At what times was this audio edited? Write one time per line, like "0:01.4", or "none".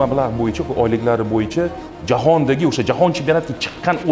0:01.9

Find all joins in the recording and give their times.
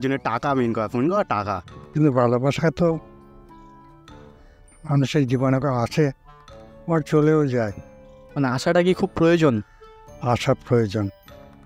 0:01.7

